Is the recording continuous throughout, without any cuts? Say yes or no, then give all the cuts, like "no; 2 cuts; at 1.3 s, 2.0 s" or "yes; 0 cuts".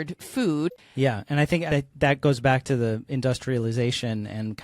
no; 2 cuts; at 0.8 s, 1.7 s